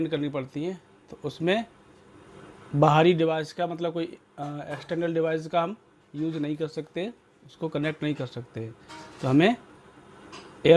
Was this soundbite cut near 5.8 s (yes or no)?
no